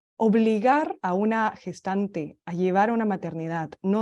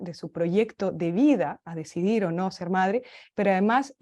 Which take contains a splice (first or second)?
first